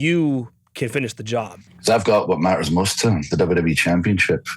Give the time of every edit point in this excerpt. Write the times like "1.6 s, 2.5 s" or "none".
1.6 s